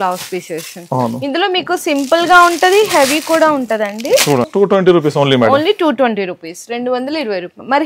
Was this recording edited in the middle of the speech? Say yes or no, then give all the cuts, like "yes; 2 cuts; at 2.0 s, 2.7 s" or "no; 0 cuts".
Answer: yes; 1 cut; at 4.5 s